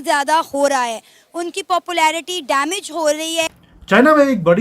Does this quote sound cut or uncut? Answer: cut